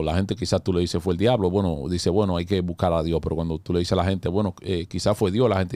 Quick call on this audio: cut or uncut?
uncut